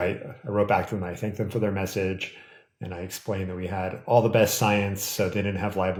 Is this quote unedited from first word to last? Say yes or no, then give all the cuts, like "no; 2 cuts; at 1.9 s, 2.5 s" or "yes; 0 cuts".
yes; 0 cuts